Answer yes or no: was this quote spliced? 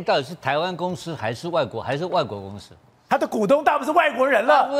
no